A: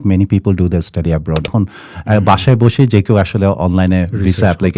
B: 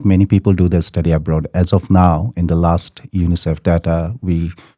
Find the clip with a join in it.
A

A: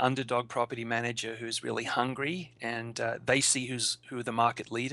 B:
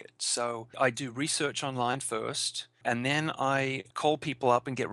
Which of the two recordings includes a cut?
B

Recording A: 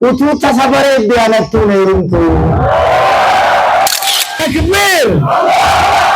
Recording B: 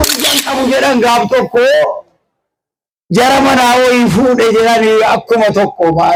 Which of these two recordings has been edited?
A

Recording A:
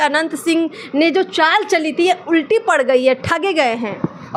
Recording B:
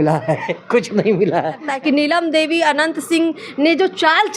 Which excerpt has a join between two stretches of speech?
B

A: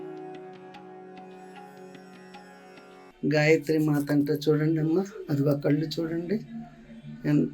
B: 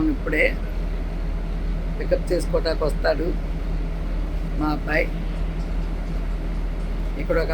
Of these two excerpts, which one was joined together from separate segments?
A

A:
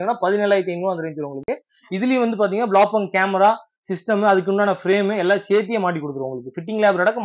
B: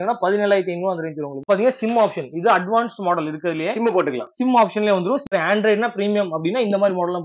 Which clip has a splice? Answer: B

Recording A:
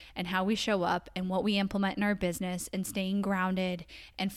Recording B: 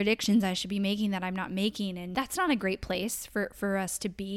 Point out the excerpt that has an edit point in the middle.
B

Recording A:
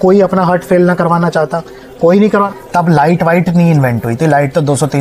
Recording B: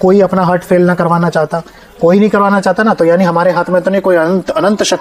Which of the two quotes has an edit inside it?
A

